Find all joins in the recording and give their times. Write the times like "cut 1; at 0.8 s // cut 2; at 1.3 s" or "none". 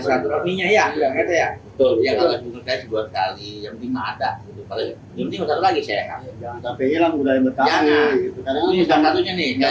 none